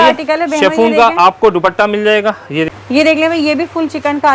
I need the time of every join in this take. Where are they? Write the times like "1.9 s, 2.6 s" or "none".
2.7 s

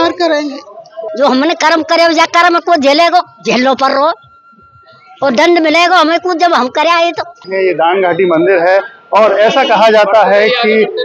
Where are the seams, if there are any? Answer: 1.0 s, 7.4 s

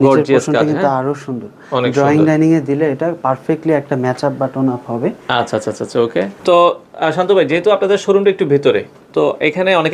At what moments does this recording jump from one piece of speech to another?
none

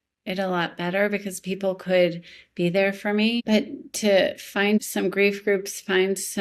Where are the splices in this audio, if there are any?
3.4 s, 4.8 s

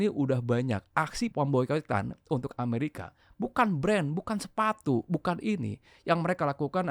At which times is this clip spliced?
1.3 s

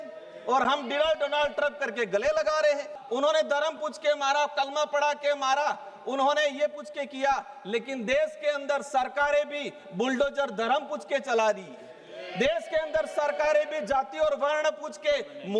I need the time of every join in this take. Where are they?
3.0 s

